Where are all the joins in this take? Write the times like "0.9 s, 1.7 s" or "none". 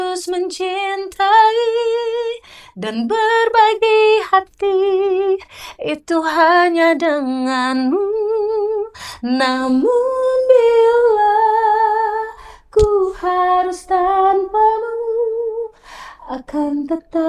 none